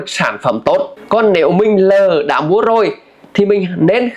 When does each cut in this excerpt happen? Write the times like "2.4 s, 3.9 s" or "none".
1.0 s